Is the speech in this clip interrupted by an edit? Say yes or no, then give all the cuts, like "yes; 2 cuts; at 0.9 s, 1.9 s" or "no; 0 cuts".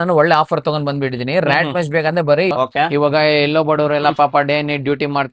yes; 1 cut; at 2.5 s